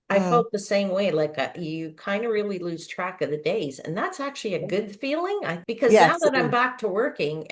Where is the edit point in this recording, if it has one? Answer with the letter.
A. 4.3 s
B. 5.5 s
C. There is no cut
B